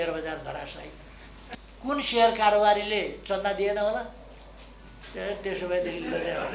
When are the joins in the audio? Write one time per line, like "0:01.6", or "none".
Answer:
0:01.5